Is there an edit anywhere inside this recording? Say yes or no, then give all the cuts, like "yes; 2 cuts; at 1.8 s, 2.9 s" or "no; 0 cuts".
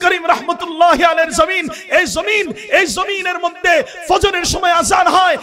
no; 0 cuts